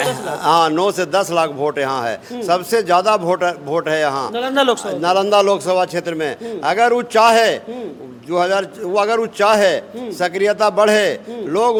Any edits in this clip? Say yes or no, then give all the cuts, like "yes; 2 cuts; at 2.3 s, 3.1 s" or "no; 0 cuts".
no; 0 cuts